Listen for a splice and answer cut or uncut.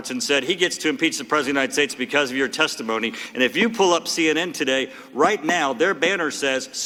uncut